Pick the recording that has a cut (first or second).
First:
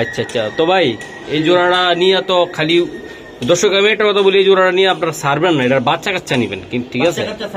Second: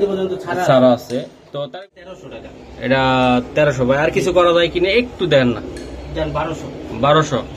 second